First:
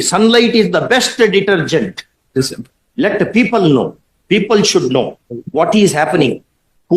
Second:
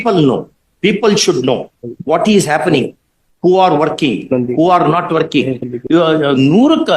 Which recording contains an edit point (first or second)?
second